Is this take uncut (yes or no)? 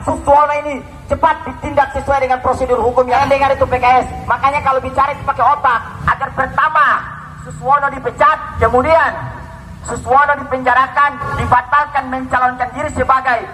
no